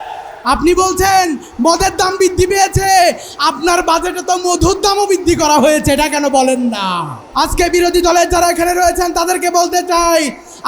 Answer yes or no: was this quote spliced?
yes